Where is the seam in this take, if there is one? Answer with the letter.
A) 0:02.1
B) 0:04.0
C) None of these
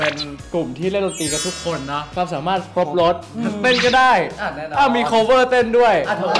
A